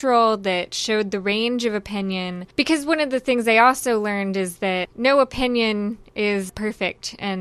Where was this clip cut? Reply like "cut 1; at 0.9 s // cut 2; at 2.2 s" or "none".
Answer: cut 1; at 4.9 s // cut 2; at 6.5 s